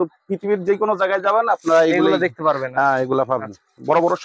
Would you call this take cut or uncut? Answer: uncut